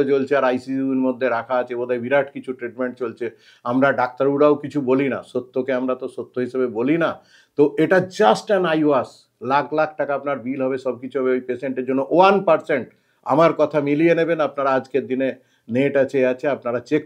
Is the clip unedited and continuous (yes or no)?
yes